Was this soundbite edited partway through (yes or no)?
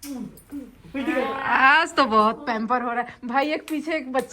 no